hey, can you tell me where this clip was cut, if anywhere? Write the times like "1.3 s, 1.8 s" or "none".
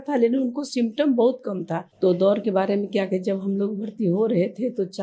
1.8 s